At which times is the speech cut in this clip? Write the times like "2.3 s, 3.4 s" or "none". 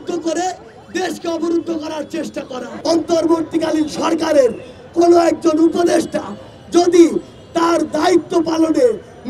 2.6 s